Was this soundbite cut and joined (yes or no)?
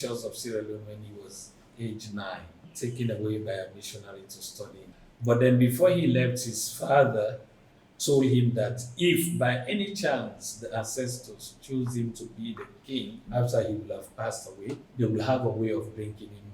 yes